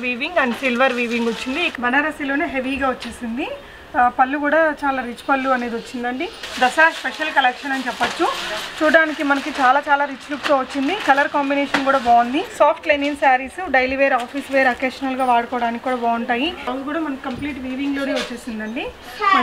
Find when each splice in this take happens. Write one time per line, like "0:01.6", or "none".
0:01.7
0:06.4
0:12.5
0:16.7